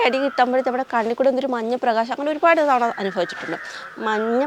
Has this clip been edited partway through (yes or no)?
no